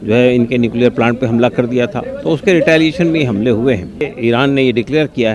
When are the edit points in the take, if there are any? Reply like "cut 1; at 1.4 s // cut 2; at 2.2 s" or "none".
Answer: cut 1; at 4.1 s